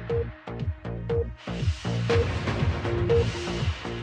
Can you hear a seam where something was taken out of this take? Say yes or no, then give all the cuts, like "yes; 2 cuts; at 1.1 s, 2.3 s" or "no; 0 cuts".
no; 0 cuts